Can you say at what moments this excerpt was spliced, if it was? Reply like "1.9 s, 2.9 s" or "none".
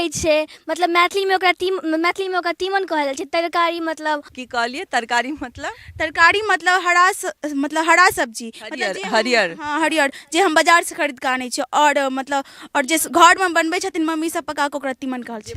4.4 s

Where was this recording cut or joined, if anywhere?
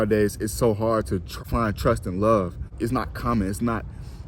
1.3 s, 2.7 s

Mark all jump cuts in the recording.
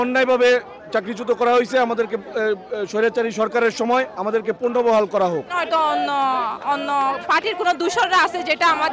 5.5 s

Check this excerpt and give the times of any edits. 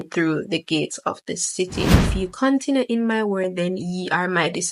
2.1 s

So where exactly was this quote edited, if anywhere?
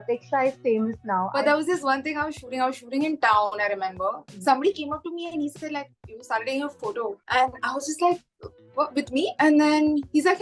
1.3 s, 4.2 s

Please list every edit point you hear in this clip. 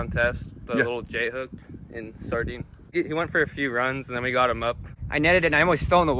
2.8 s, 4.9 s

